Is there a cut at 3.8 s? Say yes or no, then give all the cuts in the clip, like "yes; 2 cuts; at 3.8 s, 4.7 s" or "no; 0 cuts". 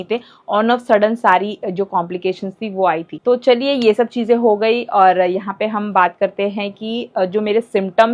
no; 0 cuts